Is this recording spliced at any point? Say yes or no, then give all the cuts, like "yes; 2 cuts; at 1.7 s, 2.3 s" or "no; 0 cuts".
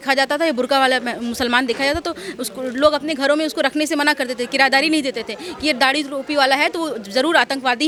no; 0 cuts